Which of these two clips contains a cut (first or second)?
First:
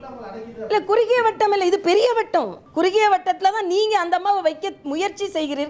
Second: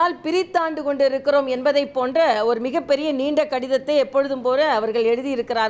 first